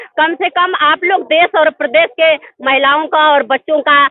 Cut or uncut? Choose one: uncut